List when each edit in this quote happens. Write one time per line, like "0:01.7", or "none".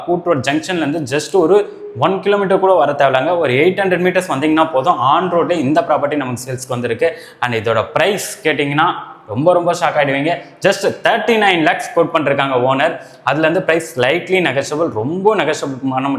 none